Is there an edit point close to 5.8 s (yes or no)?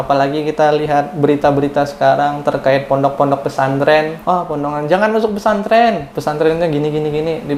no